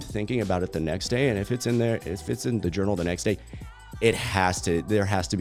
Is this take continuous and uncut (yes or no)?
yes